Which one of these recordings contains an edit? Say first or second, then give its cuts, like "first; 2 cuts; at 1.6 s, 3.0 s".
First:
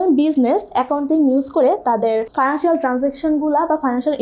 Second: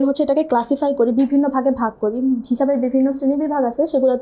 first; 1 cut; at 2.3 s